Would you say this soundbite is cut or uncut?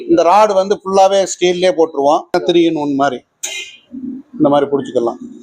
cut